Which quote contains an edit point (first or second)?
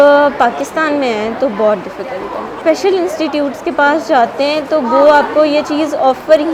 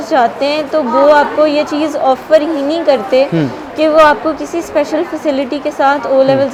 first